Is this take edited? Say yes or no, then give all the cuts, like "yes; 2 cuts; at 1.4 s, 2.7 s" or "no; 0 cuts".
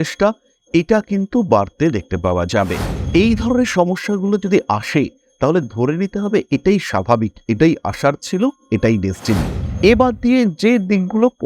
yes; 1 cut; at 2.9 s